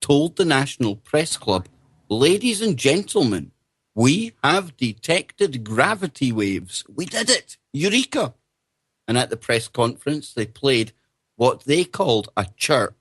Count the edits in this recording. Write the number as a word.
one